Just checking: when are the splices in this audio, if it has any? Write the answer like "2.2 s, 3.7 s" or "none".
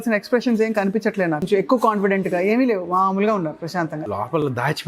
1.4 s, 3.7 s